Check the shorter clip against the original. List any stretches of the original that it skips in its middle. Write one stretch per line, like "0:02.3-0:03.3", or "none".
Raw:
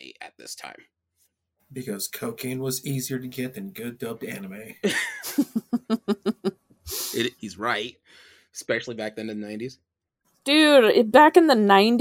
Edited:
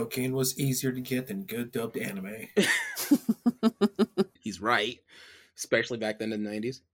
0:06.7-0:07.4

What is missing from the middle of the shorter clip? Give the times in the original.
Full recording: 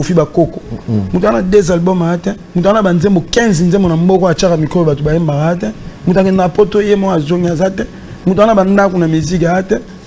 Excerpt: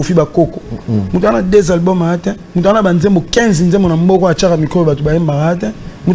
none

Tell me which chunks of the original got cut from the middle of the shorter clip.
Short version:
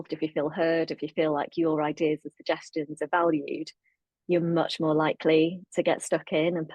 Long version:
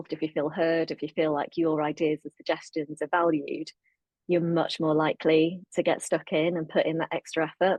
none

